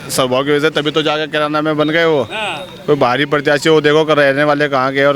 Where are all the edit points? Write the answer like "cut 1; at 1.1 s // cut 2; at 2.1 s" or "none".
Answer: none